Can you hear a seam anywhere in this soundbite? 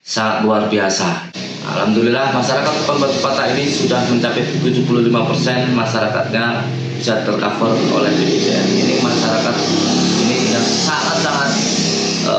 yes; 1 cut; at 1.2 s

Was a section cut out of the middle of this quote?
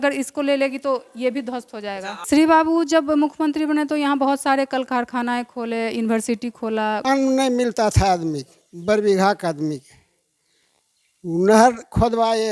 yes; 2 cuts; at 2.1 s, 7.0 s

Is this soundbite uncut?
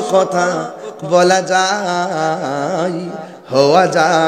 yes; 0 cuts

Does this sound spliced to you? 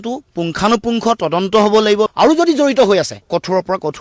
yes; 2 cuts; at 2.1 s, 3.2 s

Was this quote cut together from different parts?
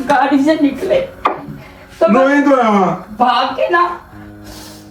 no; 0 cuts

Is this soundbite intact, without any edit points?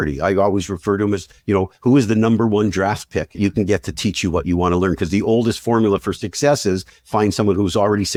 yes; 0 cuts

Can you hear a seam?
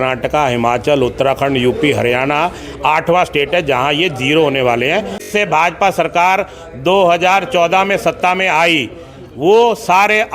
yes; 1 cut; at 5.3 s

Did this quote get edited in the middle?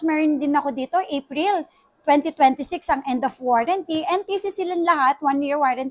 no; 0 cuts

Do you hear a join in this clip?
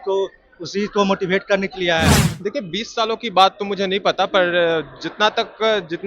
yes; 1 cut; at 2.1 s

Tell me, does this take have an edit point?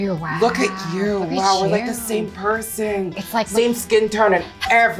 no; 0 cuts

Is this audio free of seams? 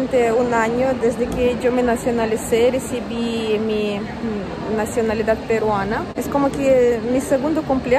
no; 1 cut; at 6.1 s

